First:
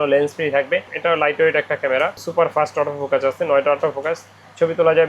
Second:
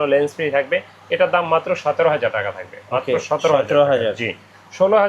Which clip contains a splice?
first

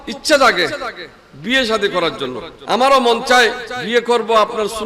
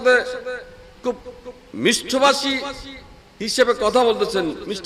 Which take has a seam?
first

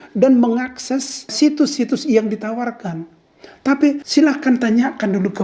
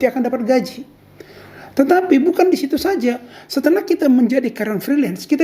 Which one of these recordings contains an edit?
first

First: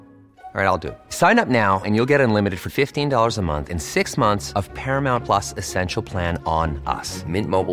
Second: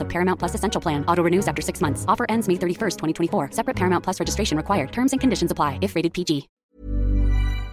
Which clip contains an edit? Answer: second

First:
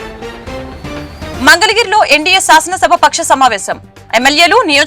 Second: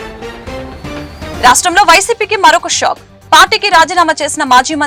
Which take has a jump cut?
first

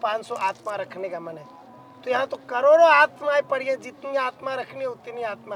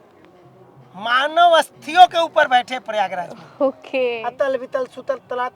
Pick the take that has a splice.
second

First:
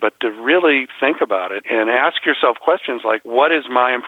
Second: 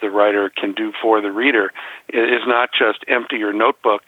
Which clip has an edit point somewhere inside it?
first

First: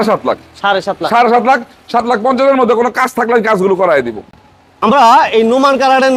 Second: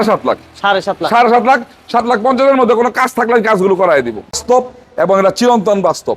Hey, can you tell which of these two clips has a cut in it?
second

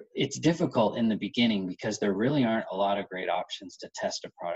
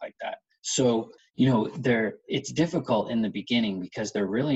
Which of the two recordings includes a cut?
second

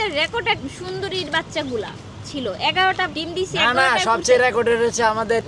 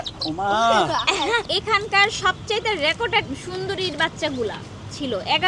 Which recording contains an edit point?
second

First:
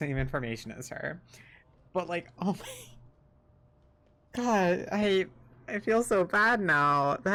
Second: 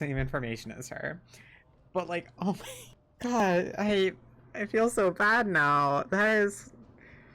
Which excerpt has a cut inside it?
second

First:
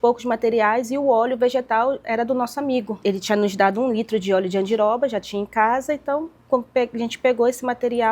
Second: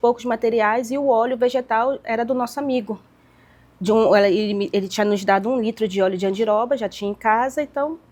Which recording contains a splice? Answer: first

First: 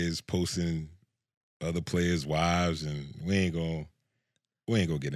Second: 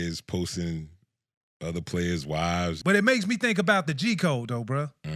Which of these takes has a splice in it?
second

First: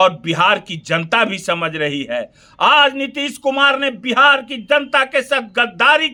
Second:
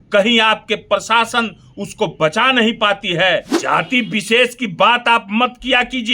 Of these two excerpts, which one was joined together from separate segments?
second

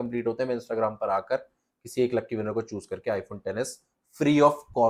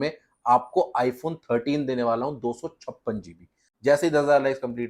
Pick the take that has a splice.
second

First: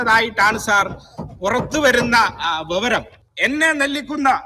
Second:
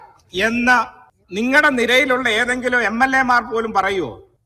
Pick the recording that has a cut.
first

